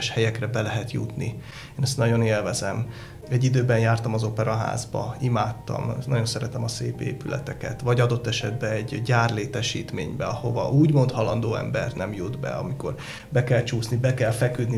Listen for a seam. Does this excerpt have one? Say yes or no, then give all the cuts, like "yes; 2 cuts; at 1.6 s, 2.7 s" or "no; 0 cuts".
no; 0 cuts